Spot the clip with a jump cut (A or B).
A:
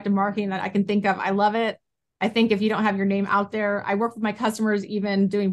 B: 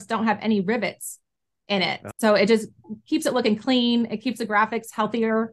B